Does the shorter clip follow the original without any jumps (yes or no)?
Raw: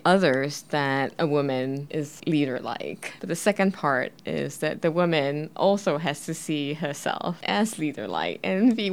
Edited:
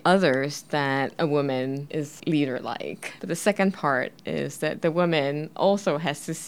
yes